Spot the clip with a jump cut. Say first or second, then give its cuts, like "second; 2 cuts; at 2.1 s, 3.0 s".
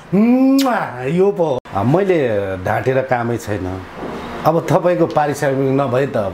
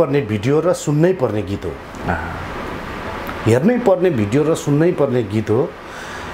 first; 1 cut; at 1.6 s